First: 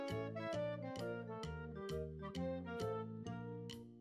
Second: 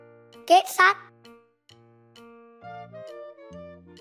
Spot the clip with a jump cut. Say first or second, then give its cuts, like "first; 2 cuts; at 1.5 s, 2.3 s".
second; 1 cut; at 1.0 s